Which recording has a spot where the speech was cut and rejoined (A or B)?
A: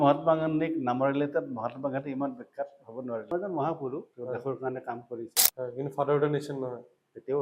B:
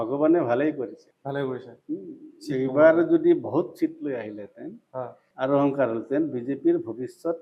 A